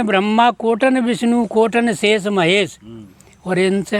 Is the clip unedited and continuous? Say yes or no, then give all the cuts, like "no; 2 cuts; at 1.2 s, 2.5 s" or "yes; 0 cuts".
yes; 0 cuts